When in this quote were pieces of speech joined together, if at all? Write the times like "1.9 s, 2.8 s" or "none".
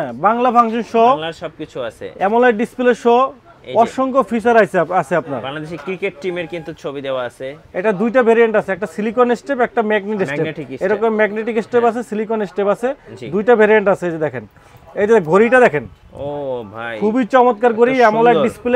7.6 s